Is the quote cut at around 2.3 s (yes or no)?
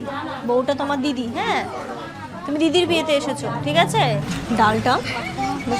no